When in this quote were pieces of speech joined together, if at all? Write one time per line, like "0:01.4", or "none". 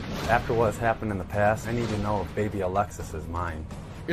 none